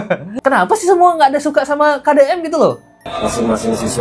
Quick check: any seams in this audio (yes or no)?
yes